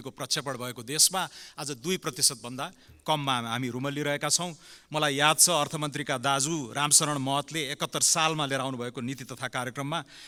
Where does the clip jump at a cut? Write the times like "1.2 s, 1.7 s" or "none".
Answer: none